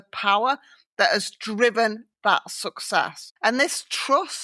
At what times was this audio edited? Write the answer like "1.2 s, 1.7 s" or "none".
3.2 s